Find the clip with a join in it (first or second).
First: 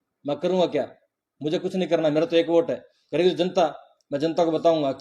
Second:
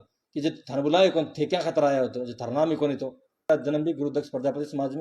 second